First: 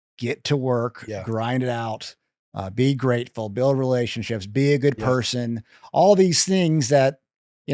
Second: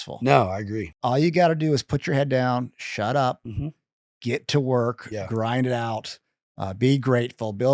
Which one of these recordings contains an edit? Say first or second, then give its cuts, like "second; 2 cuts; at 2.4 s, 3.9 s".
second; 1 cut; at 1.0 s